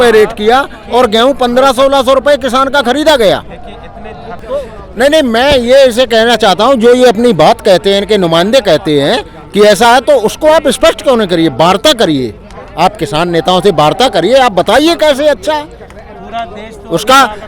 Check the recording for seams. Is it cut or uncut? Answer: uncut